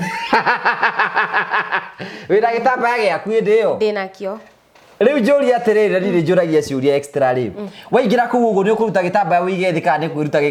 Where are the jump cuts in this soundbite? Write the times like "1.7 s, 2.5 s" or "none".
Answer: none